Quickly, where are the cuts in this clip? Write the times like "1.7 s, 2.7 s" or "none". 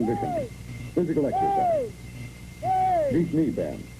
2.9 s